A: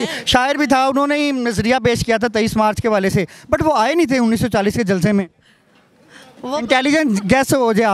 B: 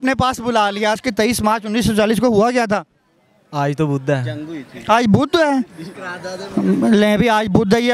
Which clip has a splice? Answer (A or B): B